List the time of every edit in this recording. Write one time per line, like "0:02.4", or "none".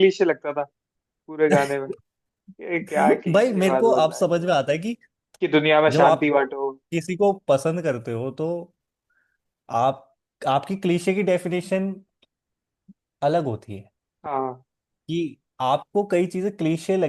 none